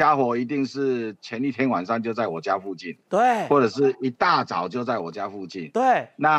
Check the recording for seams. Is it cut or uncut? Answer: uncut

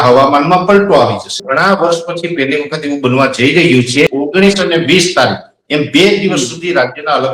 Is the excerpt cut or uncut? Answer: cut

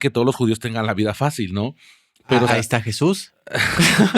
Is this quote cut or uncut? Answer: cut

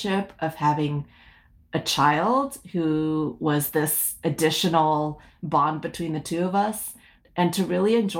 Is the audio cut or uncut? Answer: cut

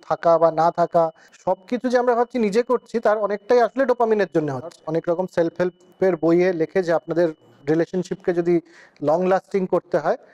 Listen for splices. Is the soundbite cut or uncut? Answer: cut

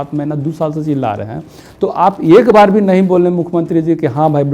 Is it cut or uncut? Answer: uncut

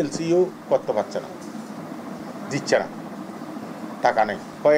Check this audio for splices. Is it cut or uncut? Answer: uncut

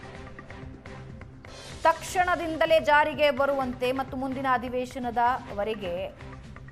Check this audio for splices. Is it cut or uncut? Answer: cut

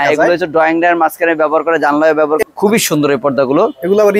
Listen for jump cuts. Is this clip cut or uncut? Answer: cut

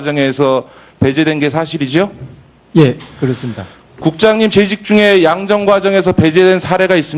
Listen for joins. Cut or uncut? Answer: cut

